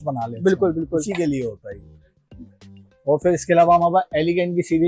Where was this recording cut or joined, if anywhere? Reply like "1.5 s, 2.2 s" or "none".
none